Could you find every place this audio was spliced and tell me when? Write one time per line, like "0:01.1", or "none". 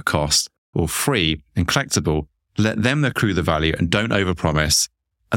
none